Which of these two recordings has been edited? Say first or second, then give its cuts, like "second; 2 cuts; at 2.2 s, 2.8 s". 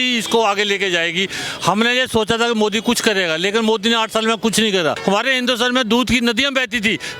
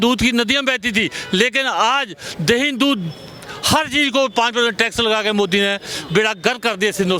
first; 1 cut; at 5.0 s